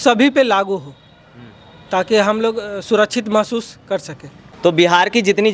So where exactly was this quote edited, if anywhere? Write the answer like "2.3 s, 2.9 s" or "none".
4.5 s